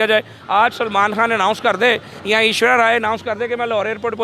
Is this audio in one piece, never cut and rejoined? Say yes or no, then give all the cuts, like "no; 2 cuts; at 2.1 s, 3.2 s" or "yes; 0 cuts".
yes; 0 cuts